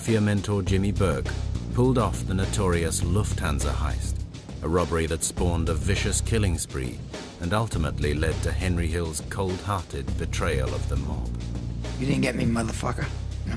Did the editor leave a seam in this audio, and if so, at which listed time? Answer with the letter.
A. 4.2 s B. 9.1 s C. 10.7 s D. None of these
B